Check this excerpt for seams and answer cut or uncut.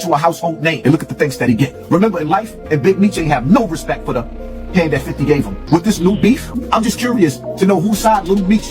cut